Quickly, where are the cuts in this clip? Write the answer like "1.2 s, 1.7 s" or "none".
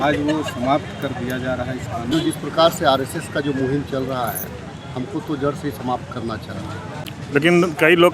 2.1 s, 7.1 s